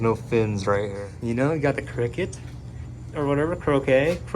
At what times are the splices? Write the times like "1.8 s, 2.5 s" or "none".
1.0 s

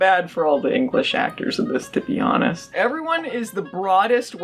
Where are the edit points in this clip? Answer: 2.6 s

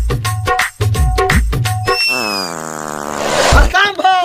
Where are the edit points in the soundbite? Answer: 2.1 s

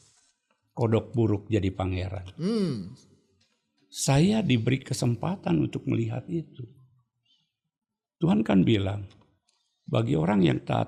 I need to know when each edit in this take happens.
none

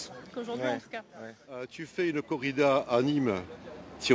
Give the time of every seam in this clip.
1.6 s

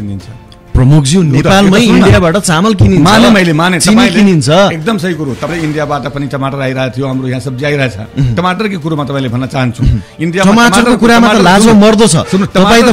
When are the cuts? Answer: 5.5 s

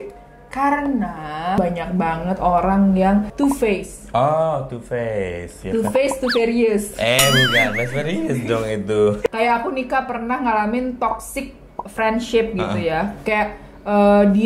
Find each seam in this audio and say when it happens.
1.6 s, 3.3 s, 9.3 s

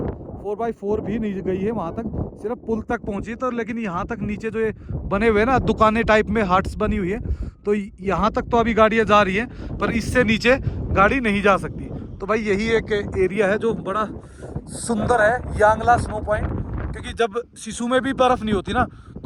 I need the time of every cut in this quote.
none

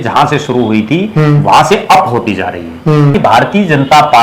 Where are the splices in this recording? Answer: 3.2 s

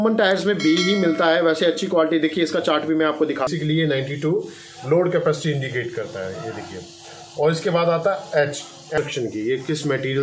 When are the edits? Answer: 3.5 s, 8.9 s

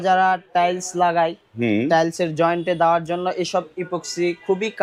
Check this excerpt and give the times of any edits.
none

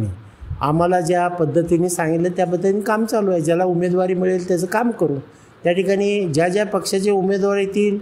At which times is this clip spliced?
none

